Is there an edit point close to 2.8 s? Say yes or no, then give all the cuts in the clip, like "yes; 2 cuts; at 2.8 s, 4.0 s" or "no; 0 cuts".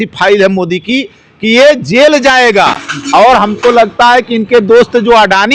no; 0 cuts